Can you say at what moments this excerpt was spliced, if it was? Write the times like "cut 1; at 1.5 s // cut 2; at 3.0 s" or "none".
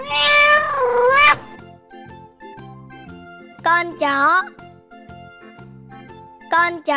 cut 1; at 1.9 s // cut 2; at 3.6 s